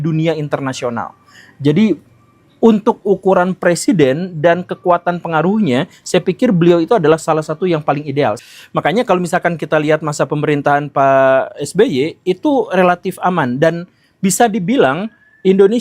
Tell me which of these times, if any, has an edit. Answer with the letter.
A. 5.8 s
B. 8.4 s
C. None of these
B